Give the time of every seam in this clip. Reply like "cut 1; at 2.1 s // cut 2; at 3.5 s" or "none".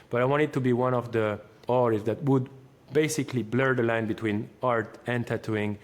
cut 1; at 1.5 s